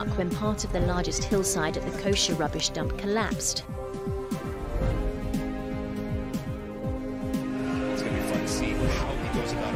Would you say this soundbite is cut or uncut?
uncut